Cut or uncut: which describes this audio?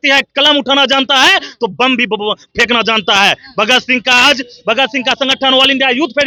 uncut